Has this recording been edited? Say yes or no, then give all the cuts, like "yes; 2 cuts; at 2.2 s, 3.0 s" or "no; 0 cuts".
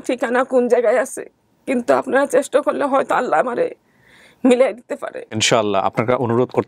yes; 1 cut; at 5.4 s